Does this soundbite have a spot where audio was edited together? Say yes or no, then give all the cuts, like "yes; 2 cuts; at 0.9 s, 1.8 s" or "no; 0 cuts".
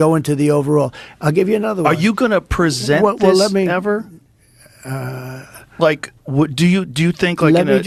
no; 0 cuts